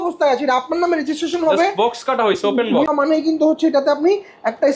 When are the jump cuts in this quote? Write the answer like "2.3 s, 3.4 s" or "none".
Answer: 2.9 s